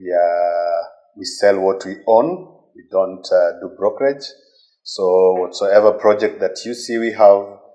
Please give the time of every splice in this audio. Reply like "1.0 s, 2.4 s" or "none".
none